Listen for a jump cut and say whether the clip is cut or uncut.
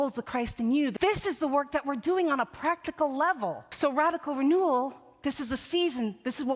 cut